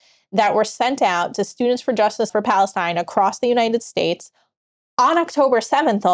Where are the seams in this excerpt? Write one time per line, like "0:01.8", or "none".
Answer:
0:02.3